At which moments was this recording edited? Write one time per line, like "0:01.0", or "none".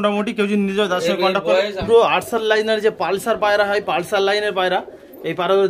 0:01.8